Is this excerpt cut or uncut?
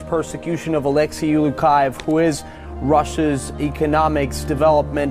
cut